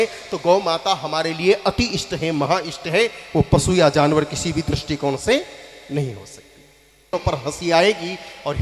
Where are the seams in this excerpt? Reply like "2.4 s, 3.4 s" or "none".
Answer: 7.1 s